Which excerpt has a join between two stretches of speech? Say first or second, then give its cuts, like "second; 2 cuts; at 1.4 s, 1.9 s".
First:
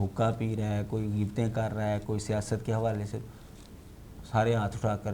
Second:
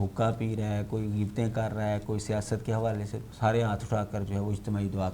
second; 1 cut; at 3.2 s